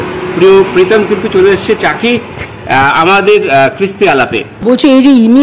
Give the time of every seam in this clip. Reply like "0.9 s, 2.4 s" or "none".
4.5 s